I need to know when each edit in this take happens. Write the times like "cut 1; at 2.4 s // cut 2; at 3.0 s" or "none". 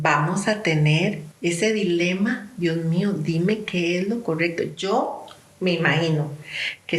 cut 1; at 1.3 s